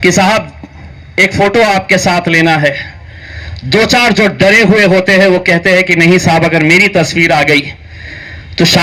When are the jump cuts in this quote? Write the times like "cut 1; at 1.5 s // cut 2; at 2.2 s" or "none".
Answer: none